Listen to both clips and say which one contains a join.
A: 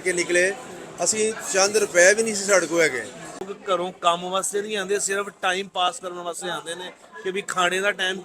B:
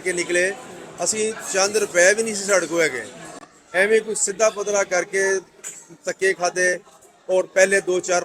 A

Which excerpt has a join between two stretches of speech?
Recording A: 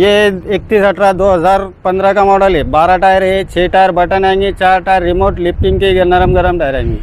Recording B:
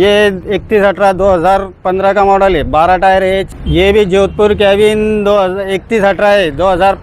B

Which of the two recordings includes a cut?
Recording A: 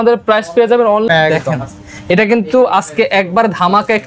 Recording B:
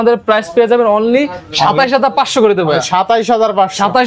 A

